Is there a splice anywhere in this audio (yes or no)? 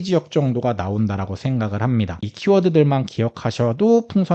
yes